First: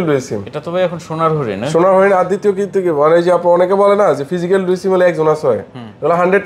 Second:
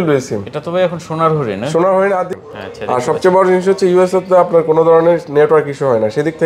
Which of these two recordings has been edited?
second; 1 cut; at 2.3 s

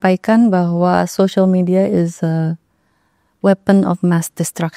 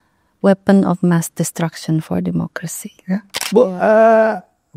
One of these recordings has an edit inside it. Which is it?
second; 1 cut; at 3.4 s

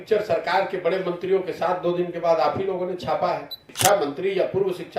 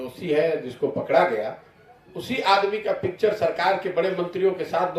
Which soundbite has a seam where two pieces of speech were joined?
first; 1 cut; at 3.7 s

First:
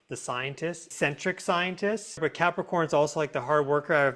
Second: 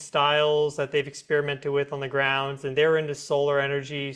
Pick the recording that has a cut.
first; 2 cuts; at 0.9 s, 2.2 s

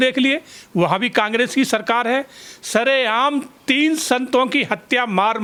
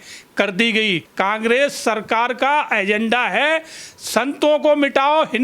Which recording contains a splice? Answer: second; 1 cut; at 1.1 s

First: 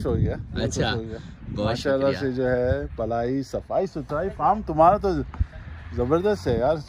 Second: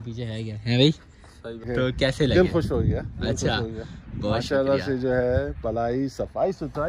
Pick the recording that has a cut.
second; 1 cut; at 1.7 s

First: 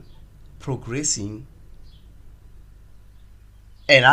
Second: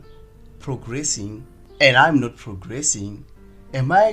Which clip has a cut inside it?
second; 1 cut; at 1.6 s

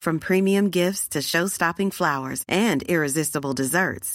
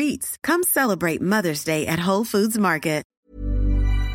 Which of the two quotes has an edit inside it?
second; 1 cut; at 3.1 s

